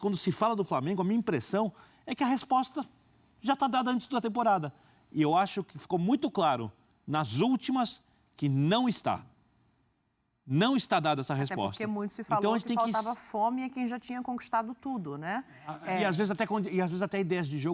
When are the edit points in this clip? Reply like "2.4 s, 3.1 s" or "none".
none